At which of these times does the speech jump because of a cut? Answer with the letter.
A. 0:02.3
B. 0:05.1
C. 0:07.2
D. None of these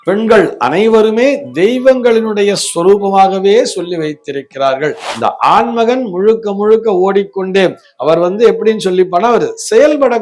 B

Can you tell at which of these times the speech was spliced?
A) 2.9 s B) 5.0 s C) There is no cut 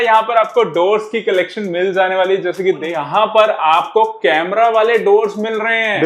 A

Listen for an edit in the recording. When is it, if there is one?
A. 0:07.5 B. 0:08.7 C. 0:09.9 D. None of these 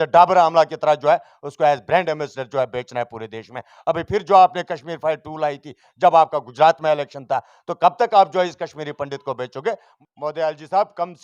C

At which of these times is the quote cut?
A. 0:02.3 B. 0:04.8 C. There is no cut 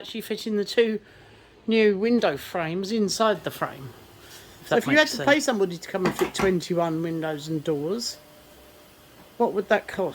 B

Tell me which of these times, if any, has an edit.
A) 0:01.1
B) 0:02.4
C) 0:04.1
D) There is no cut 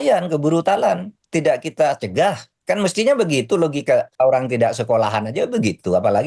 C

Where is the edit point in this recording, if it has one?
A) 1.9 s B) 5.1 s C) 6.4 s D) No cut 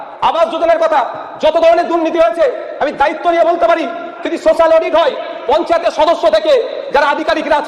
D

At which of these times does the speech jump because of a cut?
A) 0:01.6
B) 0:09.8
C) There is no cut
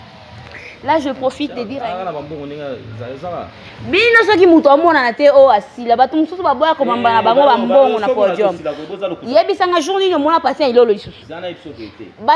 A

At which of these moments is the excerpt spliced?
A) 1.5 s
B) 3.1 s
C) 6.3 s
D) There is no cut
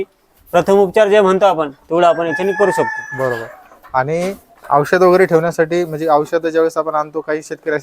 D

